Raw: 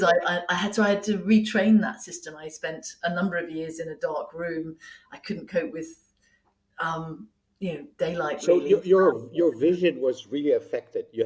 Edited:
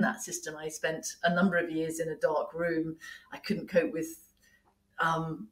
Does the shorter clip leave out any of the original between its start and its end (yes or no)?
no